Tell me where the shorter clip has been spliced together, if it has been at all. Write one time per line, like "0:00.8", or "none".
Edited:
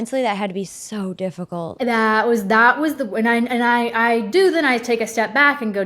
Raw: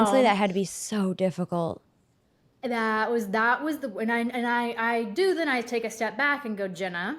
0:01.6